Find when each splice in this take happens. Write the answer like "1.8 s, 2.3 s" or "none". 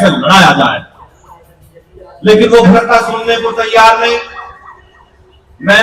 2.7 s